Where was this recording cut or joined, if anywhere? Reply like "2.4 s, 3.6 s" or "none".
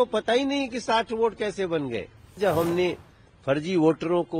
2.4 s